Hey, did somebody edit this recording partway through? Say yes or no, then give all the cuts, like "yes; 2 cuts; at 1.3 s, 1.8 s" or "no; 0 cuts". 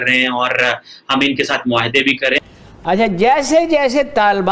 yes; 1 cut; at 2.4 s